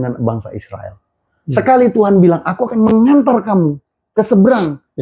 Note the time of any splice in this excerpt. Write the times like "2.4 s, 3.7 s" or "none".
none